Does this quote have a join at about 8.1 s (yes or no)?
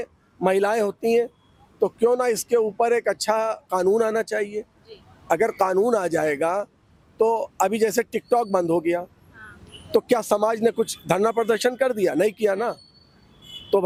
no